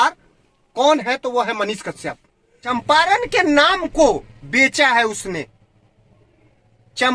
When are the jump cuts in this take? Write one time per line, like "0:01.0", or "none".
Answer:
0:02.6